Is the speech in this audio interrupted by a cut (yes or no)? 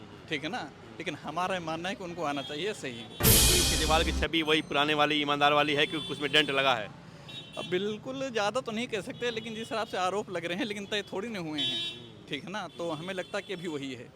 yes